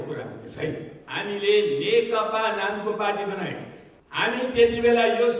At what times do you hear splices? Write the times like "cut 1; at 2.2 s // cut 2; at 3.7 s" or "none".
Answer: cut 1; at 1.0 s